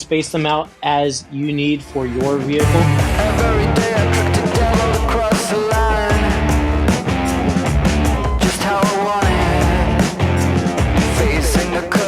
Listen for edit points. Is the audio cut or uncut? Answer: cut